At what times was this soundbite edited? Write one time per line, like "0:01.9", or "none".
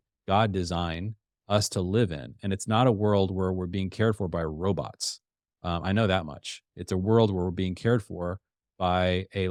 none

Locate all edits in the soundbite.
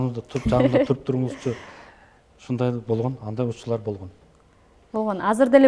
none

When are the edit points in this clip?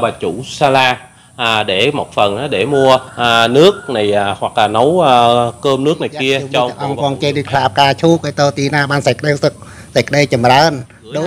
0:06.8

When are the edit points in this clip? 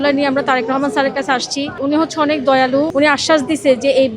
0:01.8
0:02.9

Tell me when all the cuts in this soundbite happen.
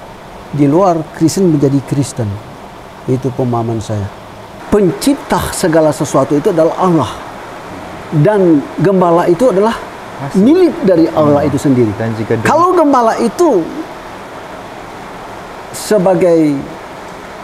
0:04.5

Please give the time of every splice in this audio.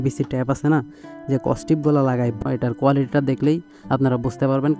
0:02.3

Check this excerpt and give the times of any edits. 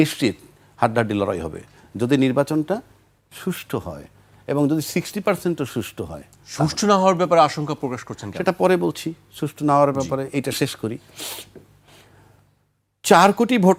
none

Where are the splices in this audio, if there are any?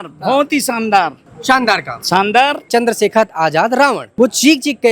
0:02.6

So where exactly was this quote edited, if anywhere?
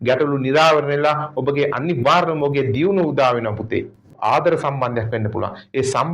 0:04.0

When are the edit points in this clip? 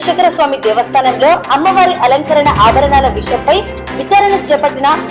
none

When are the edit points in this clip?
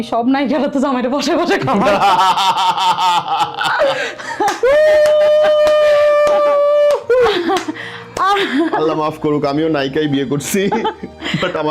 none

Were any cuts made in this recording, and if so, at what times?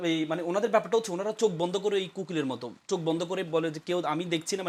none

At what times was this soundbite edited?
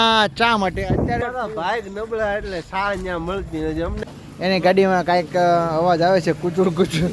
0:01.2
0:04.0

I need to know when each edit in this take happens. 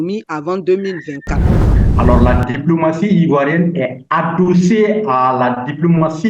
0:01.7

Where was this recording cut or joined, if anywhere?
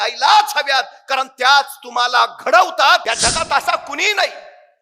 0:03.0

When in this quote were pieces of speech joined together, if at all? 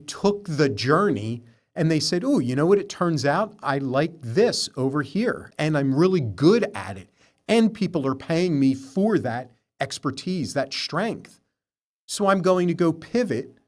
0:05.5

